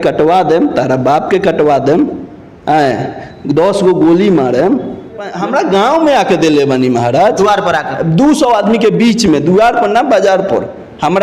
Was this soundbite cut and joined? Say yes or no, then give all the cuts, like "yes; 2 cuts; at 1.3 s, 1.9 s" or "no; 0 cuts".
yes; 1 cut; at 5.3 s